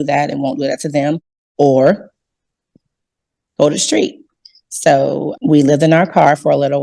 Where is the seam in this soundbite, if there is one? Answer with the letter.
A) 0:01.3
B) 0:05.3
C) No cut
B